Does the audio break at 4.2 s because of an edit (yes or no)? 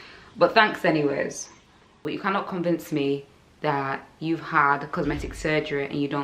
no